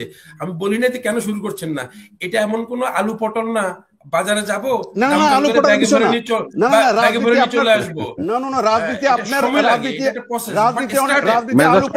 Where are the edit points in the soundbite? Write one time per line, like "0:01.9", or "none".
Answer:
none